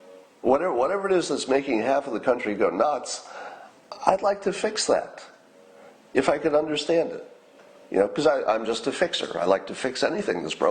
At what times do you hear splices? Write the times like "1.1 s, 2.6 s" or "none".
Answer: none